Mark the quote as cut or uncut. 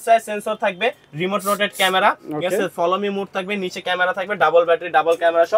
uncut